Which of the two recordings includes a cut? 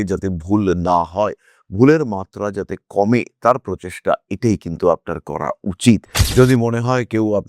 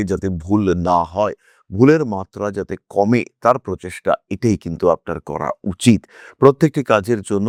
first; 1 cut; at 6.2 s

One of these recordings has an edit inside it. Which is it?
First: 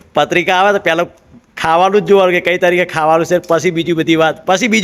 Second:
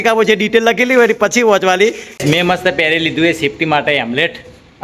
second; 1 cut; at 2.1 s

